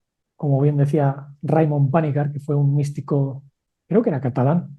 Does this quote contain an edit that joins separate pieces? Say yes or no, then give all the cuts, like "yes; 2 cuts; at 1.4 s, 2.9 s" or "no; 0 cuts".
no; 0 cuts